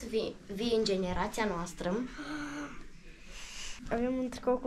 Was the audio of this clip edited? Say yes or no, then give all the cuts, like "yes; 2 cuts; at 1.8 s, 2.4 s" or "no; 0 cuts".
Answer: yes; 1 cut; at 3.8 s